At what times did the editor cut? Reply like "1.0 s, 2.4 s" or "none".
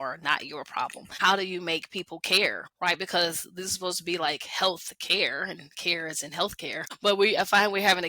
1.1 s, 2.7 s, 6.9 s